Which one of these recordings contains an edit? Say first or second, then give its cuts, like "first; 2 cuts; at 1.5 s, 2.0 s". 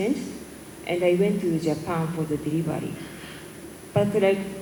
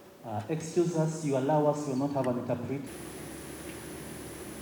second; 1 cut; at 2.8 s